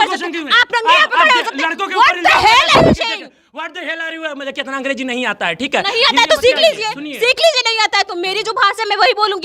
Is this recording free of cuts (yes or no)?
yes